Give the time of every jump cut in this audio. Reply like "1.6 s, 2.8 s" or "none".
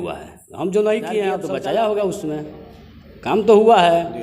1.4 s